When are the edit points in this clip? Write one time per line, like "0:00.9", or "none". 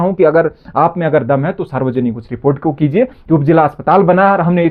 none